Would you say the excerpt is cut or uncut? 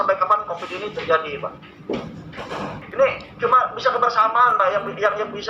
cut